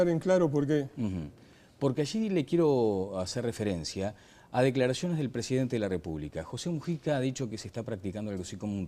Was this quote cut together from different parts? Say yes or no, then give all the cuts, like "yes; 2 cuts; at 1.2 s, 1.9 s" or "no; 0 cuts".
yes; 1 cut; at 3.9 s